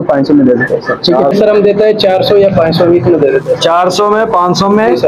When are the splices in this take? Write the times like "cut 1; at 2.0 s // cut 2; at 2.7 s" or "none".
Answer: cut 1; at 1.3 s